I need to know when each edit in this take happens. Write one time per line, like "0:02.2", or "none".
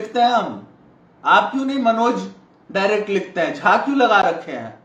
none